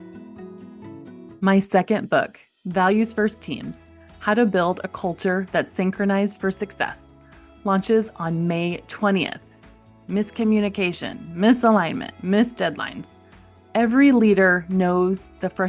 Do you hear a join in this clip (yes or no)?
yes